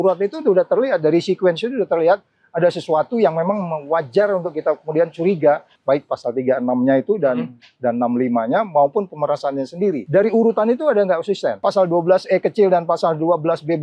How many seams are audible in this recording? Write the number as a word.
three